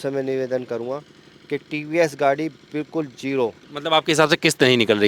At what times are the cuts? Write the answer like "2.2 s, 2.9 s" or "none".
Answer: 3.7 s